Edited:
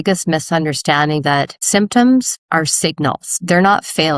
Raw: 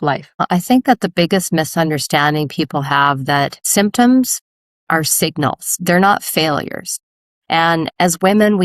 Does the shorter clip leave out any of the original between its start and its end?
yes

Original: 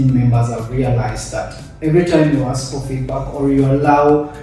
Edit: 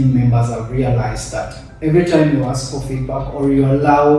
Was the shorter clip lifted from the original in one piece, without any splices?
yes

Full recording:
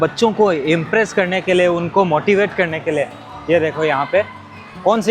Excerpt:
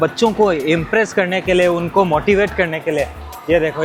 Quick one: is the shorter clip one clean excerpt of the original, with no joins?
yes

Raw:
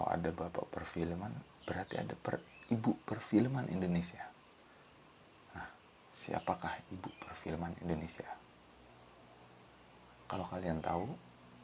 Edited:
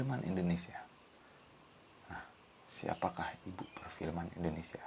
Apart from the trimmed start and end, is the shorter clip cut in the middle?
no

